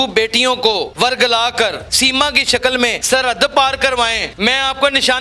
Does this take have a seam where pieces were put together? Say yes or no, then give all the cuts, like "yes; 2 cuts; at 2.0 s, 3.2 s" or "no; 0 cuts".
yes; 4 cuts; at 0.9 s, 1.9 s, 3.0 s, 4.2 s